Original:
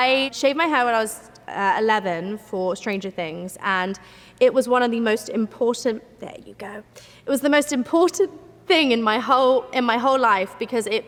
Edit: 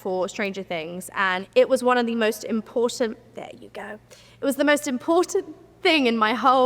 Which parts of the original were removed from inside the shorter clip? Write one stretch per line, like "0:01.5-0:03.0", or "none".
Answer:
0:03.9-0:04.3